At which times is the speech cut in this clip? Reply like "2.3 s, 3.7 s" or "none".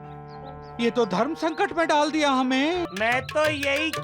2.9 s